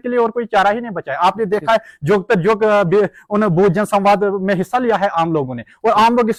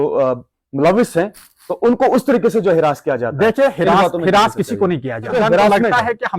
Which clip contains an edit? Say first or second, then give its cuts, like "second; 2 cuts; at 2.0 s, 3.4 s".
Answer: second; 1 cut; at 5.3 s